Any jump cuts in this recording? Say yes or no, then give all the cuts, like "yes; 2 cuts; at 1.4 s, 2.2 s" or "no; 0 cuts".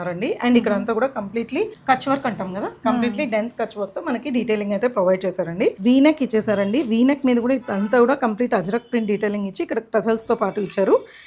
yes; 2 cuts; at 1.8 s, 5.8 s